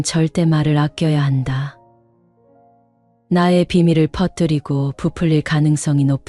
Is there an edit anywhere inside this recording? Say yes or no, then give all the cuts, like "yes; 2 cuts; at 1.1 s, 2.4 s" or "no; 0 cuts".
no; 0 cuts